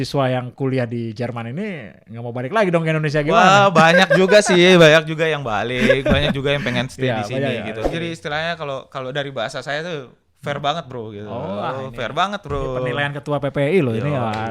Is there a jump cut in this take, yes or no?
yes